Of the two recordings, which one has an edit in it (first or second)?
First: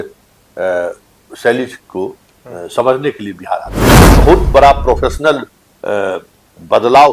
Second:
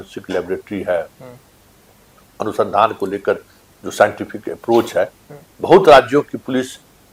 first